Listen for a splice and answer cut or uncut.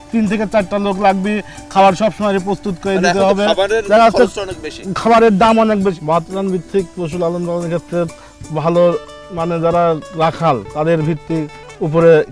cut